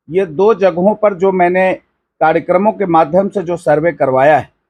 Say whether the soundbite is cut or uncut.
uncut